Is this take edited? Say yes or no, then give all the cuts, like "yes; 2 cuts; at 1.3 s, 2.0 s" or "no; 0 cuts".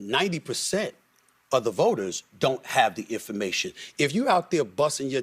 no; 0 cuts